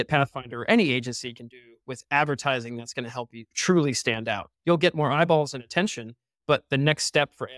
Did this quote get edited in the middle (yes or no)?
no